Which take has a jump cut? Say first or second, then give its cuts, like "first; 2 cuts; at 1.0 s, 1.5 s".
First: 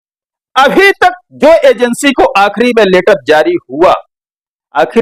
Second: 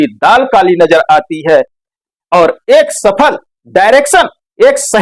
second; 1 cut; at 1.7 s